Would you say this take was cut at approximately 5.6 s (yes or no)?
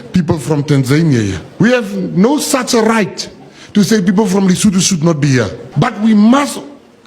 yes